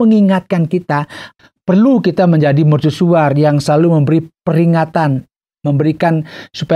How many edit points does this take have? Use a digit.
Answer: 1